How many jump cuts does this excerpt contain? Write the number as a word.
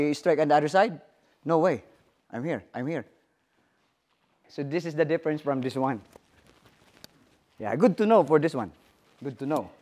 one